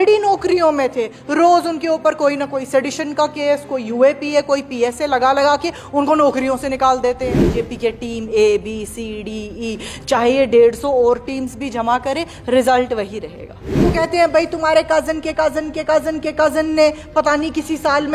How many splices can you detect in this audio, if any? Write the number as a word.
two